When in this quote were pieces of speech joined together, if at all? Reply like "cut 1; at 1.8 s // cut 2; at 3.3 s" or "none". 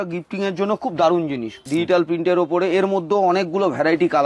cut 1; at 1.6 s